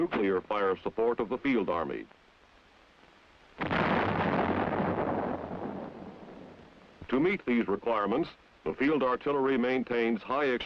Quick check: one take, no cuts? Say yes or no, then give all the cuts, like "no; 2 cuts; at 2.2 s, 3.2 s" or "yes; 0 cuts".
no; 1 cut; at 7.0 s